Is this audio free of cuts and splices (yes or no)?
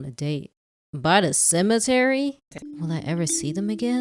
no